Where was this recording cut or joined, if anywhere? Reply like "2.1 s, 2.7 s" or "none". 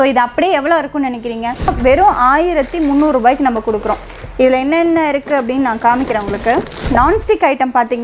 1.7 s, 6.9 s